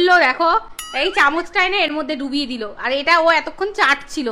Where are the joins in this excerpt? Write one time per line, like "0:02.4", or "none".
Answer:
none